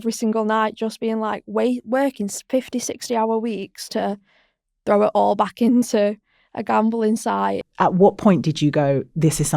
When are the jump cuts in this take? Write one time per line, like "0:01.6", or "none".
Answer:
0:07.6